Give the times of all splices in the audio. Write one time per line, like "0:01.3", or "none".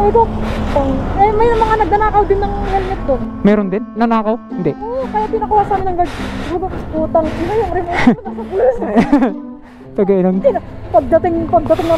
none